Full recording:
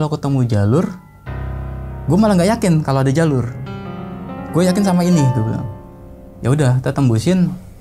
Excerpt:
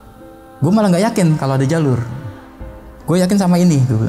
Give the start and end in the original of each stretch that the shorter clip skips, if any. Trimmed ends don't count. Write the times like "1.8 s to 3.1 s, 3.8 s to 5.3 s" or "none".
none